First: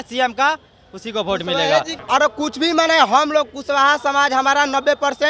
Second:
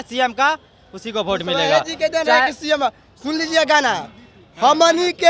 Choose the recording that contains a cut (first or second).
first